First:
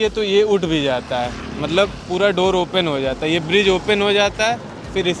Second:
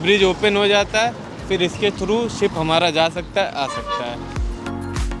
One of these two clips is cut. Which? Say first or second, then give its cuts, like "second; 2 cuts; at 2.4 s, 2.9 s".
second; 1 cut; at 4.3 s